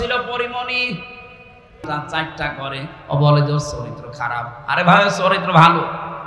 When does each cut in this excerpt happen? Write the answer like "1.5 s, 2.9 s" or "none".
1.9 s

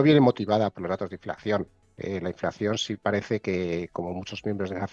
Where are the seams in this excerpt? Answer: none

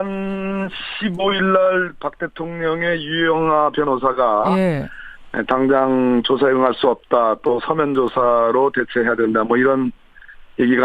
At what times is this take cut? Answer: 1.9 s

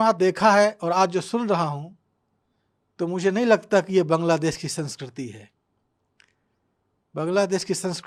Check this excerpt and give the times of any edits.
none

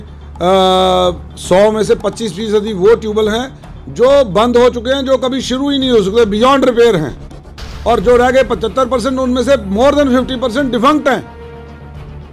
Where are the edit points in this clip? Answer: none

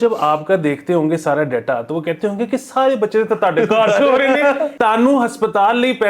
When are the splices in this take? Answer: 4.7 s

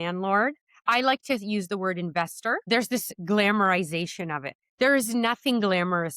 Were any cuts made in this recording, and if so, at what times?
2.7 s

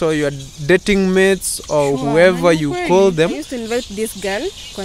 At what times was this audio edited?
3.5 s

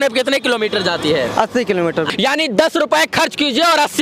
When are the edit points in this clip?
2.1 s

